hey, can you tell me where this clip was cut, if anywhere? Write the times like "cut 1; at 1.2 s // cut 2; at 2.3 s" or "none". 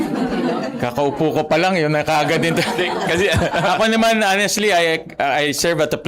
none